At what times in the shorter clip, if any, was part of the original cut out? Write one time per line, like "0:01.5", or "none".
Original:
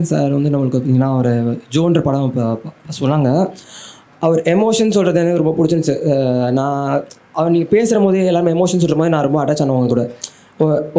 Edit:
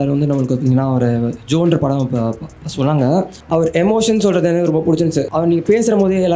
0:03.4
0:05.3